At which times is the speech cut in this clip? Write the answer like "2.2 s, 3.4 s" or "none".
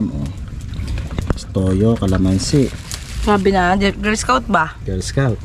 none